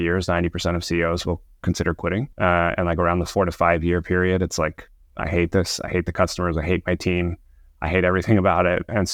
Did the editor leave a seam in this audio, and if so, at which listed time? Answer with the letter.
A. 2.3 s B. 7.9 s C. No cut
A